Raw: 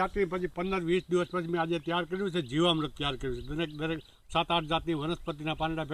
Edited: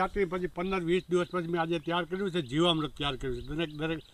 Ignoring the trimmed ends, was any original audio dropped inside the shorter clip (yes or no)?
no